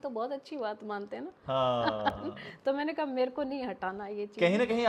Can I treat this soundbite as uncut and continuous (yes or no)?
yes